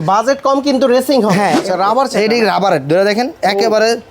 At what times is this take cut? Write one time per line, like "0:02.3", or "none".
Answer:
0:01.6